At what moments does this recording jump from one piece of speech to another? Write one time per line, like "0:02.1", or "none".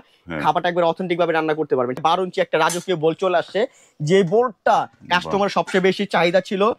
0:02.0